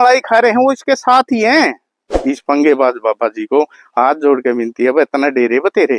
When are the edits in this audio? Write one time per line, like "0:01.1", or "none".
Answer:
0:02.1